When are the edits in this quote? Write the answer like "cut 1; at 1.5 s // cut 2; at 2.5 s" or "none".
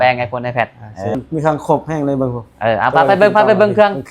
cut 1; at 1.2 s